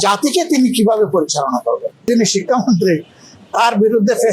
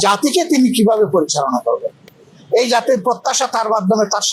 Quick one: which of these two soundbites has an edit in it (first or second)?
first